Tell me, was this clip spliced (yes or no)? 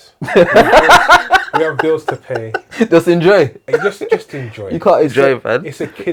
no